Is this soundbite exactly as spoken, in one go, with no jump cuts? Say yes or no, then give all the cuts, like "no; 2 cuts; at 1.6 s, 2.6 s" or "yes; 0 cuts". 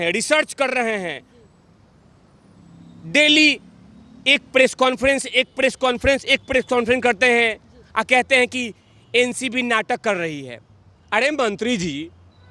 yes; 0 cuts